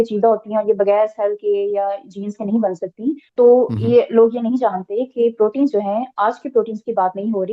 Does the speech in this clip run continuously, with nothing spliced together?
no; 1 cut; at 3.2 s

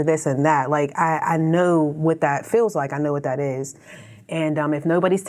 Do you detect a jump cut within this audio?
no; 0 cuts

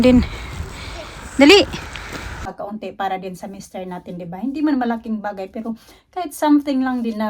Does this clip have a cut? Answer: yes; 1 cut; at 2.5 s

